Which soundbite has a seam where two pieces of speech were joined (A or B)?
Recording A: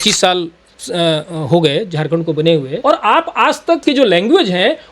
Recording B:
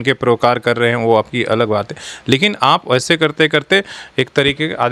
A